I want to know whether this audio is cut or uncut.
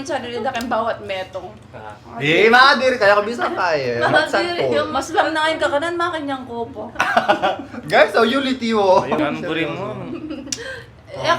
cut